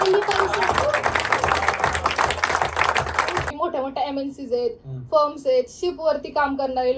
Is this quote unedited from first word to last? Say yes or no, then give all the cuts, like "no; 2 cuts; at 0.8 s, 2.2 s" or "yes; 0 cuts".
no; 1 cut; at 3.5 s